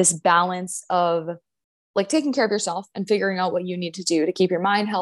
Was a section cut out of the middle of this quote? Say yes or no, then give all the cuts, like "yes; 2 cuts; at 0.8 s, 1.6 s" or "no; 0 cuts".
no; 0 cuts